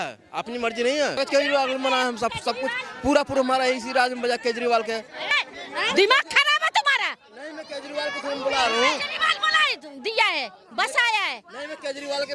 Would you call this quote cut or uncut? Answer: cut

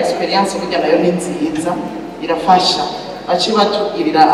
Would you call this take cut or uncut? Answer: uncut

